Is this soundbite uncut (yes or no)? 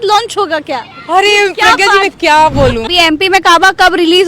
no